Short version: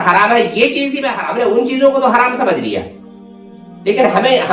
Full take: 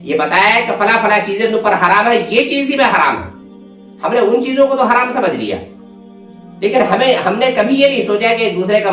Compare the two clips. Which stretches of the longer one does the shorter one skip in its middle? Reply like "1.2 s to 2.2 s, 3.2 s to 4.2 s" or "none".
2.8 s to 3.8 s